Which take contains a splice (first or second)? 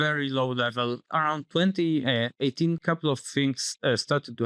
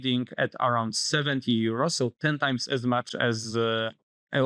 first